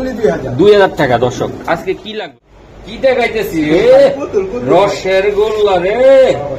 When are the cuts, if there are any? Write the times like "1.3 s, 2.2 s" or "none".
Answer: 2.4 s